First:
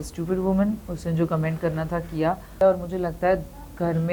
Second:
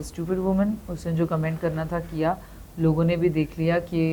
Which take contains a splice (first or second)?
first